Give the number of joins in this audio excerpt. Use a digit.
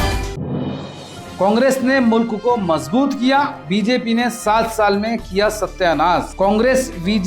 1